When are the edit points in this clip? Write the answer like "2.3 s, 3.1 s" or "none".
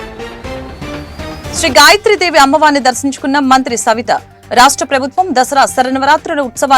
none